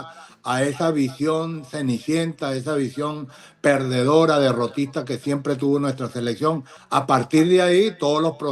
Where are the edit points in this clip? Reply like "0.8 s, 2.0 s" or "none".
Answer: 6.7 s